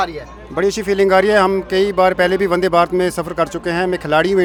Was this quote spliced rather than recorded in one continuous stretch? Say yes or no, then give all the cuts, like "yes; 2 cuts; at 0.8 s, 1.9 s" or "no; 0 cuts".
no; 0 cuts